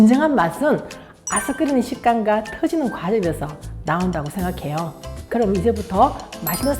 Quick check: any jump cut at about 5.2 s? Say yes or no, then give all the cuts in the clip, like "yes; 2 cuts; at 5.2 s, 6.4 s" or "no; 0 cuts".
yes; 1 cut; at 5.2 s